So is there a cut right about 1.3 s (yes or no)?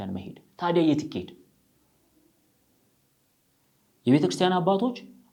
no